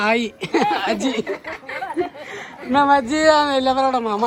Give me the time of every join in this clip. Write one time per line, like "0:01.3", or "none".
none

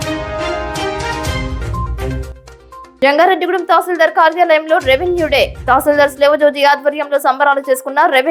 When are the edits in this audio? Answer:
none

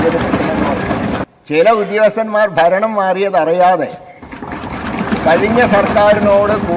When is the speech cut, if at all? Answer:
0:01.2

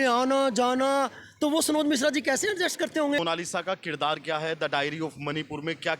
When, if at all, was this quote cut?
0:03.2

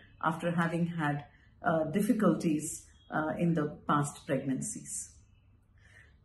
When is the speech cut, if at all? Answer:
none

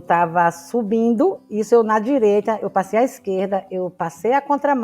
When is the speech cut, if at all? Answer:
0:01.5

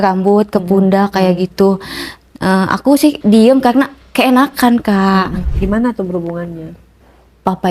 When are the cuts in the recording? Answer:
0:03.2
0:05.4

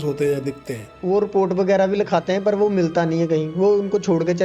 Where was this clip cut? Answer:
0:00.9

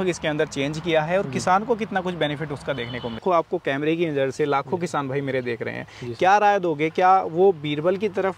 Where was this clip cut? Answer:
0:03.2

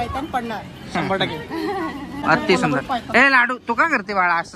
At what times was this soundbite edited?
0:02.2

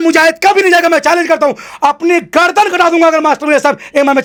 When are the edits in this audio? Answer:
none

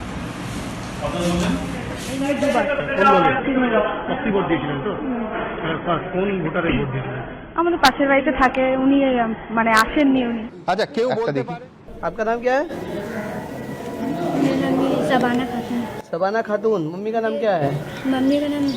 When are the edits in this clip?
0:02.0
0:11.3

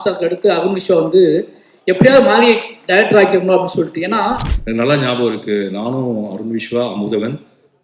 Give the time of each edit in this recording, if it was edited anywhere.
0:04.5

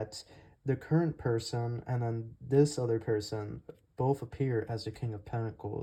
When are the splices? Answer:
none

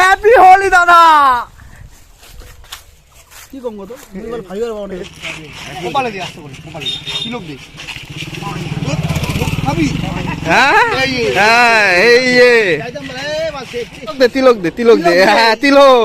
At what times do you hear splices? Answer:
0:05.0
0:14.2

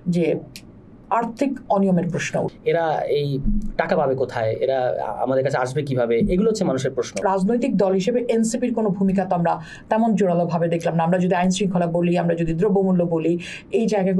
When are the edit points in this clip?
0:02.5
0:07.1

